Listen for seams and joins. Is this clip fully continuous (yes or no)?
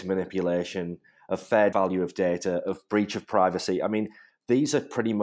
yes